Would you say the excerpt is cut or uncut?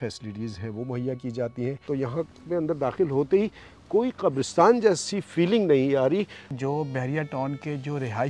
cut